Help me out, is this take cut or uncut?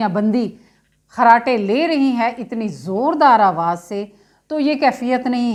uncut